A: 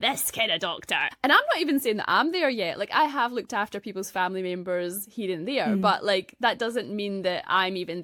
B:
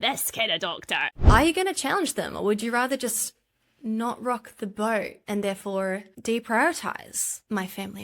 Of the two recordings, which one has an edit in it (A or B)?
B